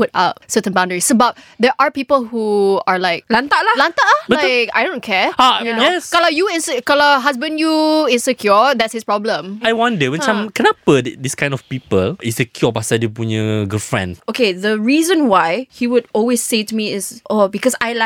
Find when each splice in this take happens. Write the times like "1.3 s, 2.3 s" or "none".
3.2 s, 9.6 s, 12.2 s